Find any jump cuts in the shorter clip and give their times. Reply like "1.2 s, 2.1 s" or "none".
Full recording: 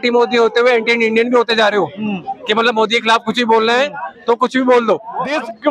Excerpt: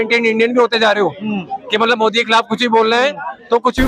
none